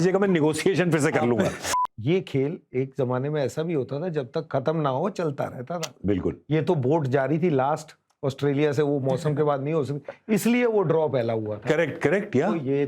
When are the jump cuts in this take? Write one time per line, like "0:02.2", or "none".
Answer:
0:01.7